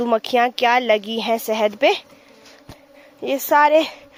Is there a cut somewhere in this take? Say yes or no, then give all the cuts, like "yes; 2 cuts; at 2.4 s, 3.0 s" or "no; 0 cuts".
no; 0 cuts